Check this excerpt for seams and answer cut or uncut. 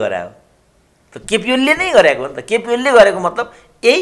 uncut